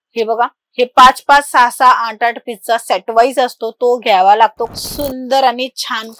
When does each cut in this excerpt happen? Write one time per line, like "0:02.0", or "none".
0:04.6